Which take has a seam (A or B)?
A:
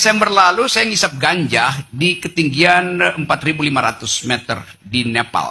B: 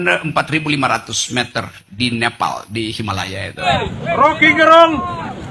B